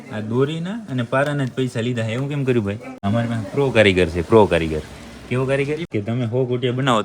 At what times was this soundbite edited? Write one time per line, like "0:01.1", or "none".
0:02.9
0:05.8